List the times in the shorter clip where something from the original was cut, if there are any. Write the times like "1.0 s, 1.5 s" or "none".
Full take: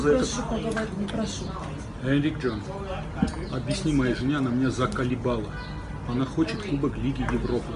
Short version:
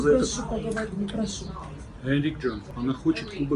2.7 s